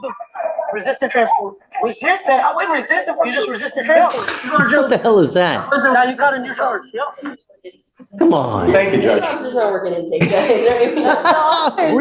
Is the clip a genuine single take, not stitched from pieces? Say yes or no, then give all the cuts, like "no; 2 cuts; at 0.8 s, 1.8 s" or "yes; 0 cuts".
no; 1 cut; at 4.0 s